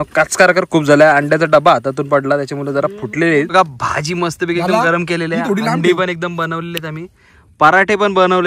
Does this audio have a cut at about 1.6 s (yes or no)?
no